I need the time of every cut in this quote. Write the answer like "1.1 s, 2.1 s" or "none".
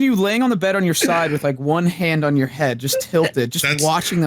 none